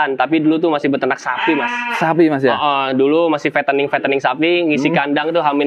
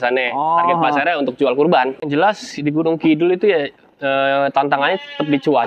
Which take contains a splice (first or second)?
second